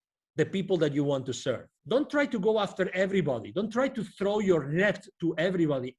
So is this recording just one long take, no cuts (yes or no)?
no